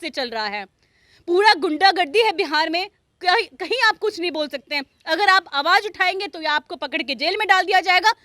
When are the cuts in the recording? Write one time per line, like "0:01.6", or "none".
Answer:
none